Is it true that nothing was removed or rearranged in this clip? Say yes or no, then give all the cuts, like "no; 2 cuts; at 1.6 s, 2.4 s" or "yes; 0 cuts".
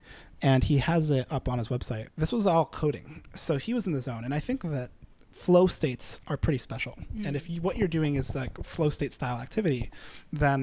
no; 1 cut; at 2.0 s